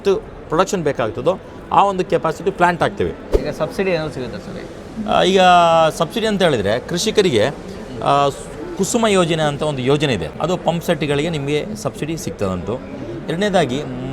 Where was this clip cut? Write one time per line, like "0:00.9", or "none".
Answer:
0:03.3
0:10.3